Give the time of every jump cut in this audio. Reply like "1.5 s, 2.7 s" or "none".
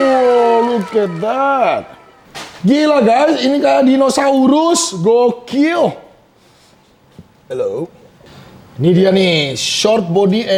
none